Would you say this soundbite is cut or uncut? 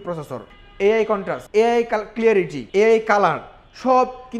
cut